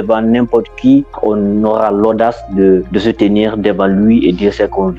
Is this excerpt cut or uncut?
uncut